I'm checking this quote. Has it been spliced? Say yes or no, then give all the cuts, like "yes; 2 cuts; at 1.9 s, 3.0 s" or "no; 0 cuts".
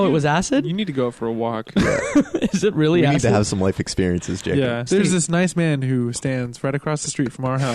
yes; 1 cut; at 4.9 s